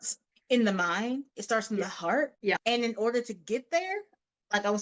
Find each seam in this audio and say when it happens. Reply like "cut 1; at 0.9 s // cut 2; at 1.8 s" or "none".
cut 1; at 2.4 s